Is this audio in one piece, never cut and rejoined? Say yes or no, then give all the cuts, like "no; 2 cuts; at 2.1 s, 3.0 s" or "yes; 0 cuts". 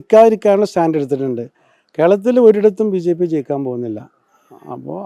yes; 0 cuts